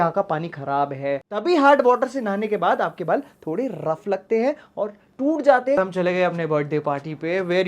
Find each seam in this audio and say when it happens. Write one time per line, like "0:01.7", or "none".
0:01.2
0:05.0
0:05.8